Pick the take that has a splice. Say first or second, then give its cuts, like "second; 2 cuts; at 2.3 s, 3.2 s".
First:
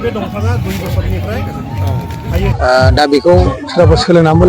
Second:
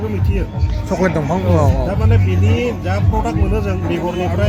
first; 1 cut; at 2.5 s